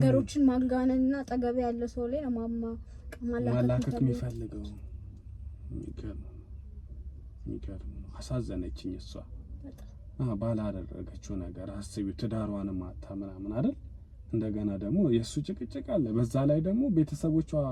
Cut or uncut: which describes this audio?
uncut